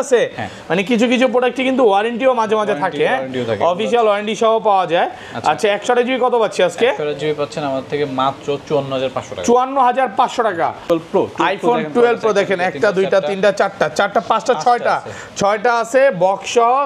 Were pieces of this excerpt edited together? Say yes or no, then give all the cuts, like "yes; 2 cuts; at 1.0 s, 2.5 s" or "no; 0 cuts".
yes; 1 cut; at 10.9 s